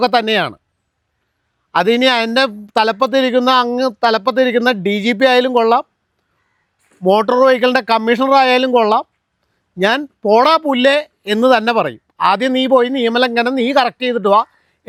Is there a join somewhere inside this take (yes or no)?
no